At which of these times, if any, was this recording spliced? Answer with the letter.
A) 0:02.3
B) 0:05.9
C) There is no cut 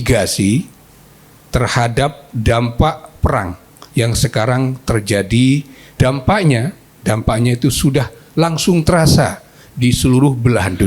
B